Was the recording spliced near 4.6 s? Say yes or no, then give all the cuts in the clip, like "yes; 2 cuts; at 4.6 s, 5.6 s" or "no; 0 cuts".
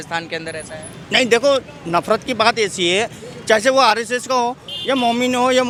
no; 0 cuts